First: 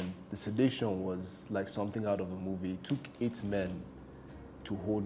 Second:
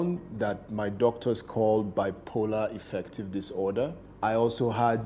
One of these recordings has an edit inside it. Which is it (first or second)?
second